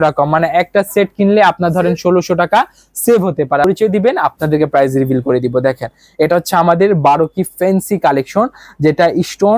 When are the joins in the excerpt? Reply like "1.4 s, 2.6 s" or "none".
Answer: 3.6 s